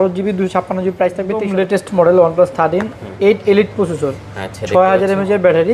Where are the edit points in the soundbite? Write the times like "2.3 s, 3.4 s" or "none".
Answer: 1.5 s